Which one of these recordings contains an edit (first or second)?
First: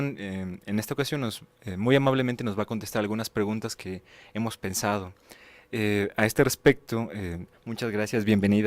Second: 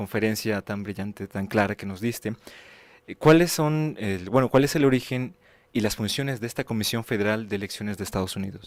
first